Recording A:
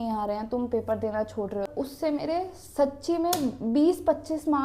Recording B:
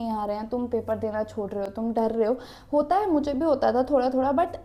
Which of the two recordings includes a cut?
A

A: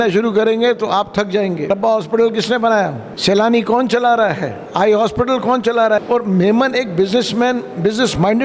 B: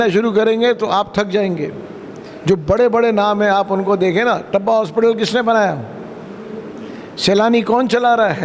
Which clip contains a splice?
A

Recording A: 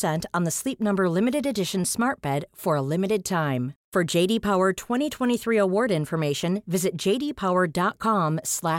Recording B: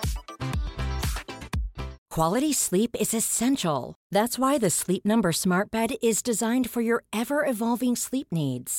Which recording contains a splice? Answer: B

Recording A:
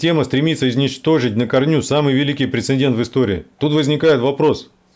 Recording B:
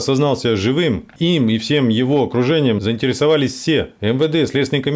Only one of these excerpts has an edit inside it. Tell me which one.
B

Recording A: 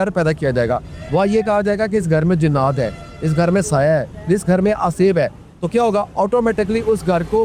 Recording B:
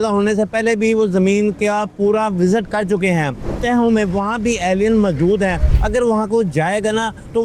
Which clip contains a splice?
B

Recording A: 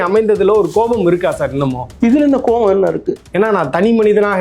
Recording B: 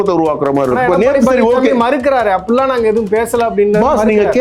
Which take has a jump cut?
A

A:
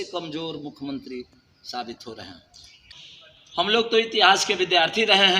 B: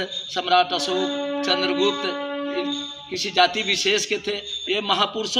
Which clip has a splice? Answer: A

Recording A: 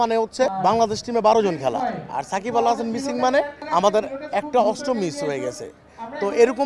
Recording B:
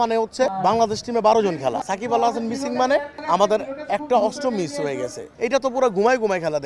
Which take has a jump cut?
B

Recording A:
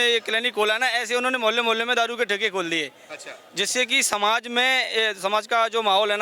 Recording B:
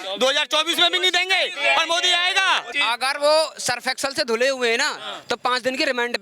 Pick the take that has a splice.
B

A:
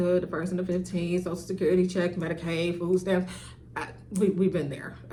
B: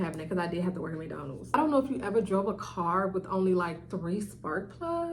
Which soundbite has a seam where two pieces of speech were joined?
B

